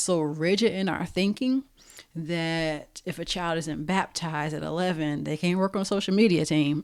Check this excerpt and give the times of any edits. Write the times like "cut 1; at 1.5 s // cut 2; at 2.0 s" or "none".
none